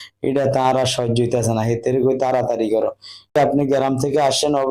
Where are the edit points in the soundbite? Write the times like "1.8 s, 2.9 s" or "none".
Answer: 3.3 s